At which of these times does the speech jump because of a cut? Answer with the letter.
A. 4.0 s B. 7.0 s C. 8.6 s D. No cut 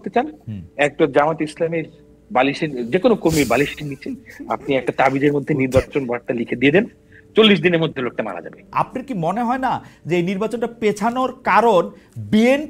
C